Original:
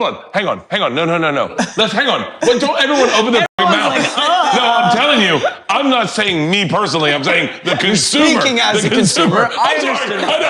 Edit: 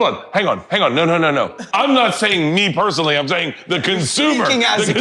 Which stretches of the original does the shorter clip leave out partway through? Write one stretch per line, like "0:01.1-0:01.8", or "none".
0:01.6-0:05.6

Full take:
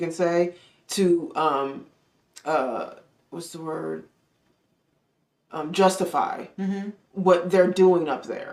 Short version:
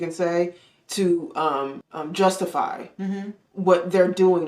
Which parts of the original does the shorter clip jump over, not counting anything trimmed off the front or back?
0:01.9-0:05.5

